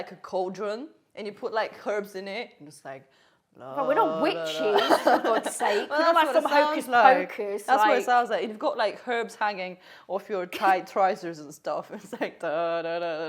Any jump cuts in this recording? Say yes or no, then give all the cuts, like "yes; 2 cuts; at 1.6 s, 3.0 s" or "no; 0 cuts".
no; 0 cuts